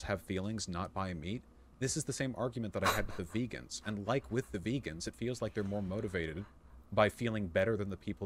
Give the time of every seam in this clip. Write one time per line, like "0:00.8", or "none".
0:04.3